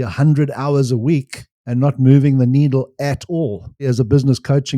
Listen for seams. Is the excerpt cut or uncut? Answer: cut